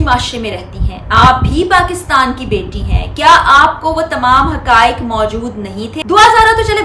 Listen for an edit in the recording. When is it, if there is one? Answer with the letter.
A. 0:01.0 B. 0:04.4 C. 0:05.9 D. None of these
C